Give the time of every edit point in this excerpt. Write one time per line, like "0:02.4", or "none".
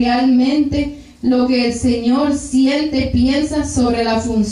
0:01.6